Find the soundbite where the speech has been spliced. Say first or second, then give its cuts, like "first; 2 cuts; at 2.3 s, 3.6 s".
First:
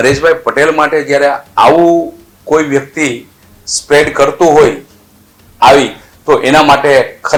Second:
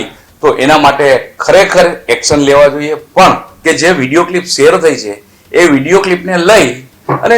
second; 1 cut; at 3.5 s